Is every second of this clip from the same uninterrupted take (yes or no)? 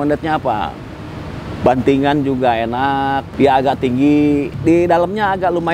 no